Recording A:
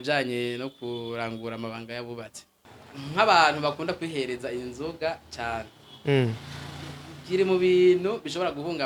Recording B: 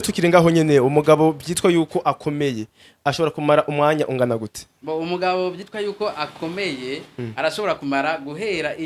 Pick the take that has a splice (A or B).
A